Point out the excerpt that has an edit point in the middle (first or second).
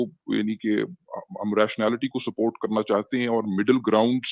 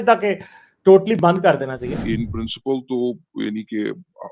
second